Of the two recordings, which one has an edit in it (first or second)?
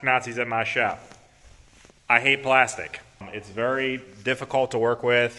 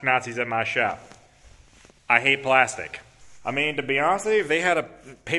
second